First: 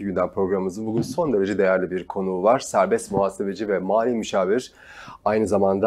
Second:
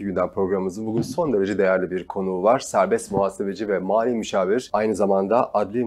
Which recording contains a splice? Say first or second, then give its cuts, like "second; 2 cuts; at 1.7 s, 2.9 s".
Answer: second; 1 cut; at 4.7 s